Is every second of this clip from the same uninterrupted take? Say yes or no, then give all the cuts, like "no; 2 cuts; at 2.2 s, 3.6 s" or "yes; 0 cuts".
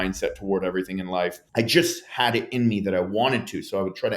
no; 1 cut; at 1.4 s